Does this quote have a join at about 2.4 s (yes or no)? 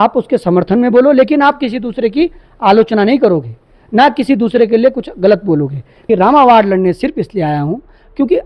no